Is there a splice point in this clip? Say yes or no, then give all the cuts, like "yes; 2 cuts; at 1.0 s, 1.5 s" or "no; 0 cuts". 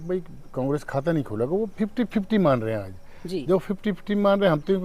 no; 0 cuts